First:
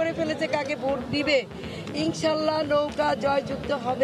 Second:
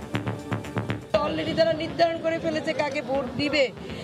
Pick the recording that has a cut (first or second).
second